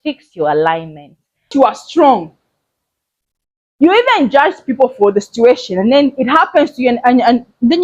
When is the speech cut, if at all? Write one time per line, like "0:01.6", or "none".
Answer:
0:01.5